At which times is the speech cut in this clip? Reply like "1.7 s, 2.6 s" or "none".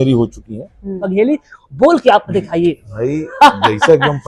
1.1 s

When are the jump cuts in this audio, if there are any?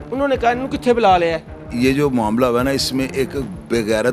1.6 s

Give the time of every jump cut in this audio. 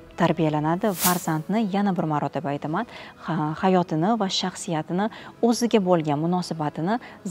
1.0 s

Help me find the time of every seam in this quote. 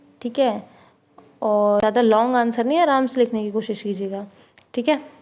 1.8 s

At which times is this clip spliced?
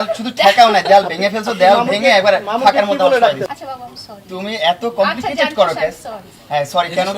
3.5 s

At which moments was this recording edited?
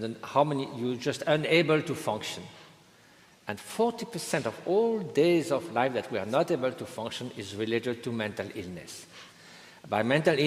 none

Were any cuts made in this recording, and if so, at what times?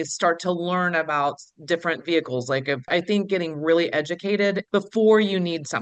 2.9 s, 4.6 s

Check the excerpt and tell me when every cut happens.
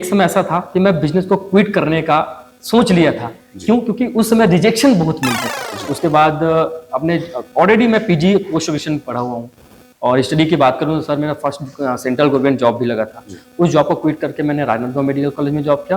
5.9 s

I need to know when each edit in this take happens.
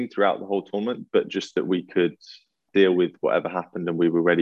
2.6 s

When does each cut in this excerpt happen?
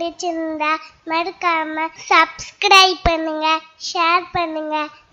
2.0 s

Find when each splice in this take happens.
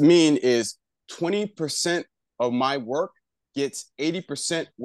none

